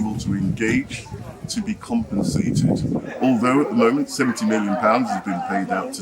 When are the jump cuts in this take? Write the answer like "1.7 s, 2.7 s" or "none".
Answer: 3.1 s